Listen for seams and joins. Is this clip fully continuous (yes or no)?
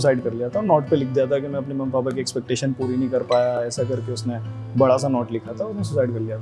yes